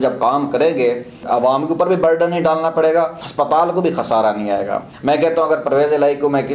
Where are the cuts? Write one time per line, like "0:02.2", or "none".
0:01.2
0:03.2
0:04.9